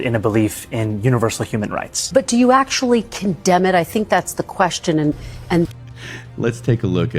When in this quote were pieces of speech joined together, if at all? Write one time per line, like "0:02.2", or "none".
0:05.7